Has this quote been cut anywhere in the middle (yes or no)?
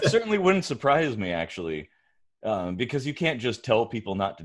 no